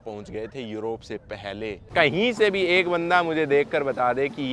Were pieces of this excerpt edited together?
yes; 1 cut; at 1.9 s

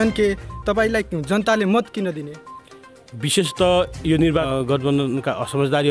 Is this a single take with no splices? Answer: no; 1 cut; at 4.5 s

